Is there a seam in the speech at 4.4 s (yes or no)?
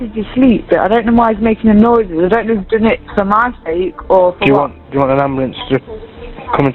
yes